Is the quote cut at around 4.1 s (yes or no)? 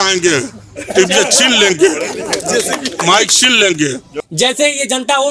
yes